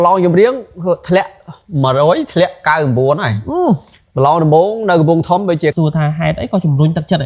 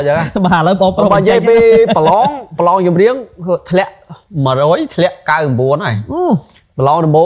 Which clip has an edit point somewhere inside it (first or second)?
first